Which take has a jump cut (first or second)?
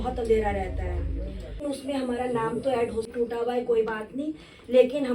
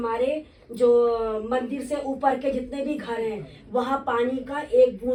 first